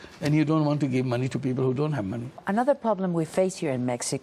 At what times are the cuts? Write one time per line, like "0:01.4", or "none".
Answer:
0:02.4